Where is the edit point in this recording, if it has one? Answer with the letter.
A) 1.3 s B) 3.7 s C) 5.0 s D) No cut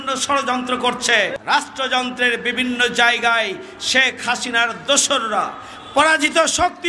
A